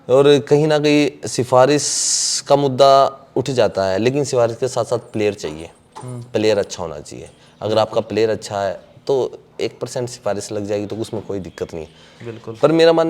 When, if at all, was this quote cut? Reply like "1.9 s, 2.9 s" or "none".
none